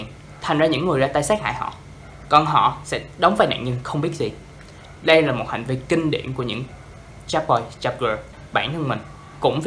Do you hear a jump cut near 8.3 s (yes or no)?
yes